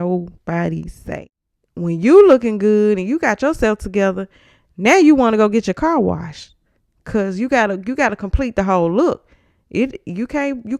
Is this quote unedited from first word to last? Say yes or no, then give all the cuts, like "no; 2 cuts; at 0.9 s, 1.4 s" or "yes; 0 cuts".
no; 1 cut; at 1.0 s